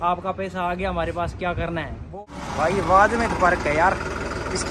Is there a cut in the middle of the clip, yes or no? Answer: yes